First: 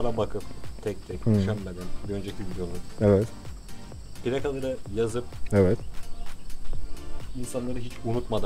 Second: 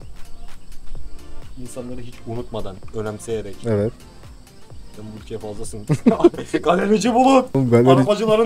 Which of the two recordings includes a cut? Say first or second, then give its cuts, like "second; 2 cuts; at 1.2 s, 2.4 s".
second; 1 cut; at 7.5 s